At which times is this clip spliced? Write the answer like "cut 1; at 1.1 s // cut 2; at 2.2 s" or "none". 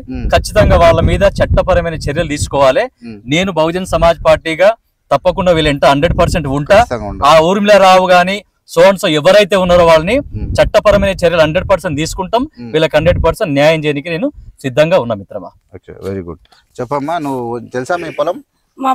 none